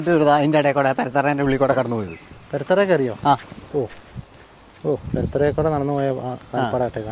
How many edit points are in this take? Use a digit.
0